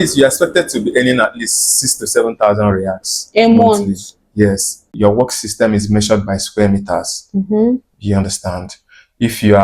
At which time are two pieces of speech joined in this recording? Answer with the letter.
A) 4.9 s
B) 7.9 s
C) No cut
A